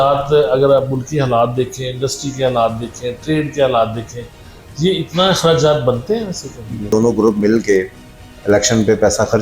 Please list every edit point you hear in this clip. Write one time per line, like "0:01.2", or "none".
0:06.9

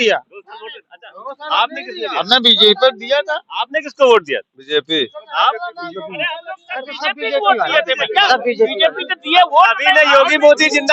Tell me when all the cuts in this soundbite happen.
none

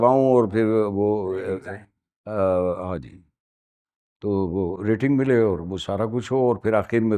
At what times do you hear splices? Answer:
none

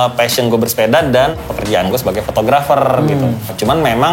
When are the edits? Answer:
none

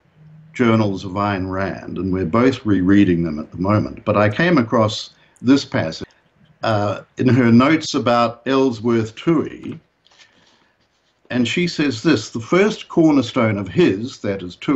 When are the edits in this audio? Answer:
0:00.9

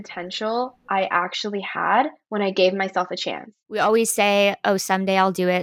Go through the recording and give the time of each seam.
0:03.6

